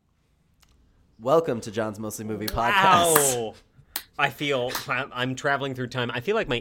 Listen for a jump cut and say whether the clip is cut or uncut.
cut